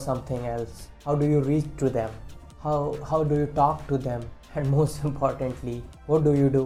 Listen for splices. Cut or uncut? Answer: uncut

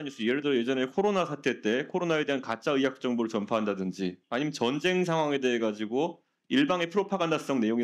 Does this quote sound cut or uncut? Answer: uncut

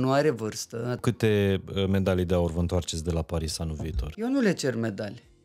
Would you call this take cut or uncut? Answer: cut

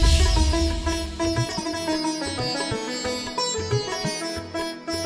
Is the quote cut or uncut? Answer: cut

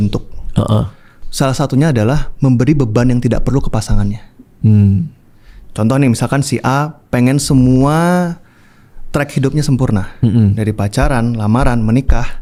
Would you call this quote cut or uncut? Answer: uncut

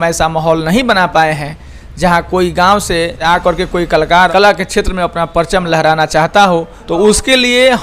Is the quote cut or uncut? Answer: cut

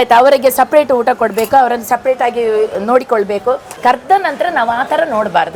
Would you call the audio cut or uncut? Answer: uncut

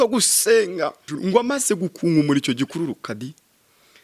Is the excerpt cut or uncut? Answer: cut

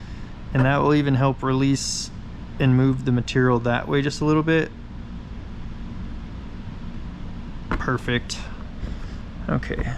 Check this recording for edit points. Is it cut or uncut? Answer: uncut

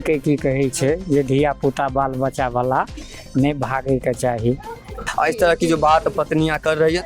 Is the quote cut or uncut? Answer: cut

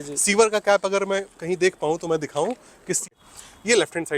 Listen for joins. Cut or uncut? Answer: cut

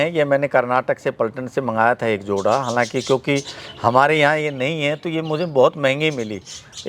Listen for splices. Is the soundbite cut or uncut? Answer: uncut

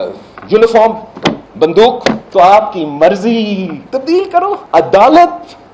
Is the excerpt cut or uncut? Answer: cut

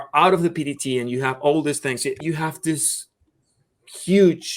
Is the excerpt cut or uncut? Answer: cut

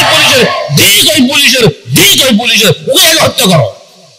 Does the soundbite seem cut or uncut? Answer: uncut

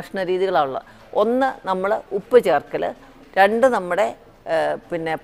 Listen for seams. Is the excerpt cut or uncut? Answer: uncut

